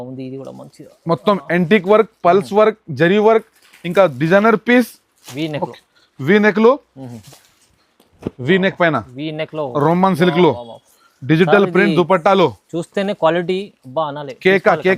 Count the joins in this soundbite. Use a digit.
1